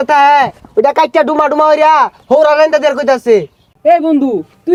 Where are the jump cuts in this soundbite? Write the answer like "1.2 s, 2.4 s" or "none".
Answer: none